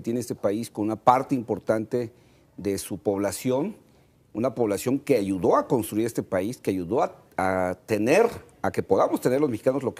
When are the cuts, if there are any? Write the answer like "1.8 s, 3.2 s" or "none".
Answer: none